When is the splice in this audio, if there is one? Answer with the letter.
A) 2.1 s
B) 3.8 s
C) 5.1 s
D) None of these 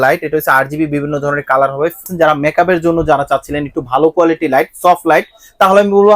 A